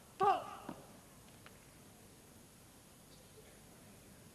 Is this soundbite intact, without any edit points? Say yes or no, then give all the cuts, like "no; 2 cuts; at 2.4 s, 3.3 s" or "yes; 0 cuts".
yes; 0 cuts